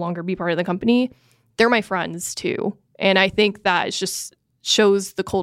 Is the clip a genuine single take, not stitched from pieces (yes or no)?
yes